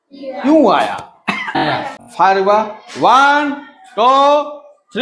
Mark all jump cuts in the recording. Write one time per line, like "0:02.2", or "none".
0:01.6